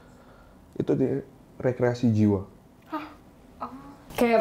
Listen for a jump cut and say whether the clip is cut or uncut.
uncut